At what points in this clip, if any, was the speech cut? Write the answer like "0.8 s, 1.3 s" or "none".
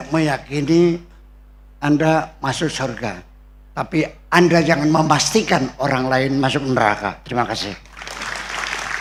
none